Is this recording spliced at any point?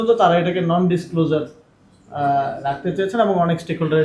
no; 0 cuts

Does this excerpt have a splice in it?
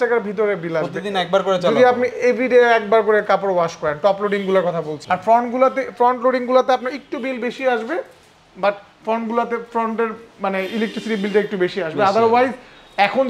no; 0 cuts

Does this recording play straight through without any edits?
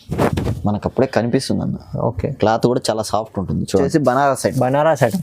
no; 1 cut; at 3.9 s

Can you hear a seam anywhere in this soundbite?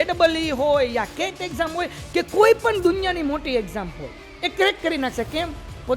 no; 0 cuts

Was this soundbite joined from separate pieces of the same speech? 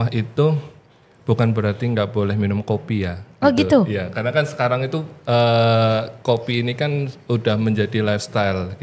no; 0 cuts

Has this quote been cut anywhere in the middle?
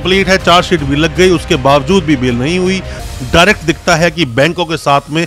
yes; 1 cut; at 2.9 s

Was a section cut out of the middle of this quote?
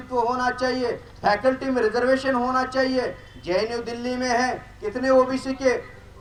no; 0 cuts

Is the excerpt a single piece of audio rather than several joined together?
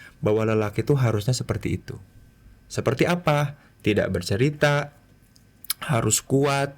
yes; 0 cuts

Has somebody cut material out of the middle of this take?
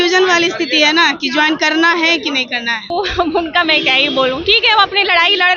yes; 1 cut; at 2.9 s

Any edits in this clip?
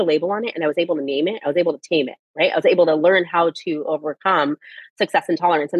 no; 0 cuts

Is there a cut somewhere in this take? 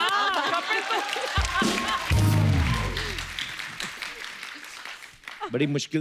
no; 0 cuts

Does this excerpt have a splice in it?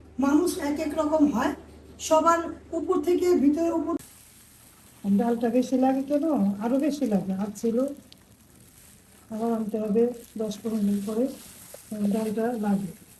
yes; 1 cut; at 4.0 s

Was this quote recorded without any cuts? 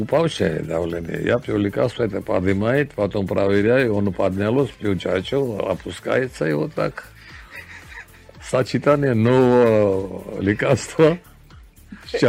yes; 0 cuts

